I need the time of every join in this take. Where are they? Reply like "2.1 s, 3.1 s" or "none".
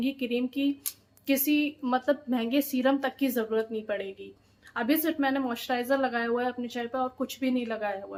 none